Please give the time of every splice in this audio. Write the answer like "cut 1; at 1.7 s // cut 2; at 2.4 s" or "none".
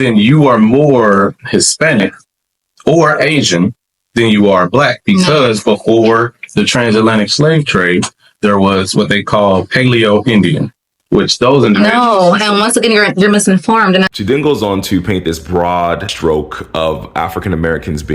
cut 1; at 14.1 s